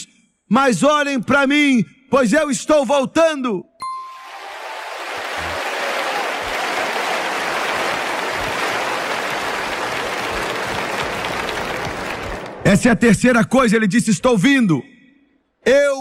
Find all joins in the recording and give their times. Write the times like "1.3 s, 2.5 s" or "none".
none